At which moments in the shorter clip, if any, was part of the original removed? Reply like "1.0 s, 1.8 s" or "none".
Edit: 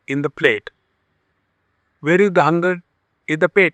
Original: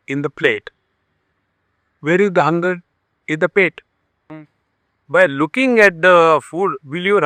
none